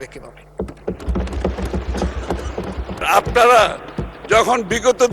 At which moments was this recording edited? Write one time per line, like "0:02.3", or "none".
0:03.0